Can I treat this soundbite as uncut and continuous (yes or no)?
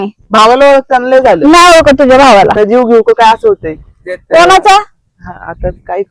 no